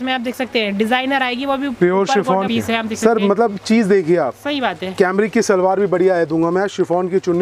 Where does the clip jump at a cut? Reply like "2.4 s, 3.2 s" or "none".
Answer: 2.5 s